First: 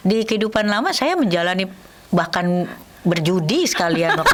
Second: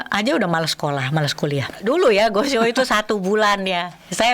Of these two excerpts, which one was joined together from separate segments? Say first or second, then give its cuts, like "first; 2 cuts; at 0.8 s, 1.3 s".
second; 1 cut; at 1.8 s